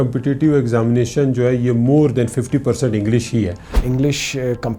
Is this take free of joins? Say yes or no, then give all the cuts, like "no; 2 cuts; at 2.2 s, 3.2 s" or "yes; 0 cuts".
no; 1 cut; at 3.7 s